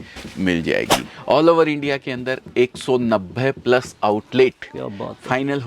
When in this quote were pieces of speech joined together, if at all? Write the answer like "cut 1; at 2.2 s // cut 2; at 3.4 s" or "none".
cut 1; at 1.1 s